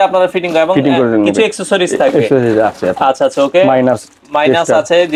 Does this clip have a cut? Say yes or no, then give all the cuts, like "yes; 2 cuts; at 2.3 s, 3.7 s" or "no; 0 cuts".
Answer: no; 0 cuts